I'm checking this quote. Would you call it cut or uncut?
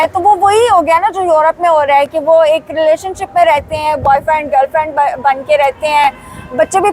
uncut